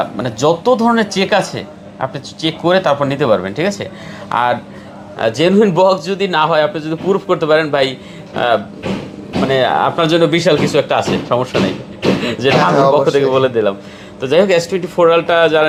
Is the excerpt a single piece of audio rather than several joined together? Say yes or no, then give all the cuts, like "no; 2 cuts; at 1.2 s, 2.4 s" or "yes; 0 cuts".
yes; 0 cuts